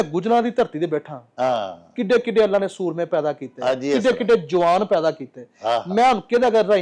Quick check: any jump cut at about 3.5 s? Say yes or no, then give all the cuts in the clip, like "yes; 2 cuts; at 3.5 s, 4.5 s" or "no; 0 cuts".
no; 0 cuts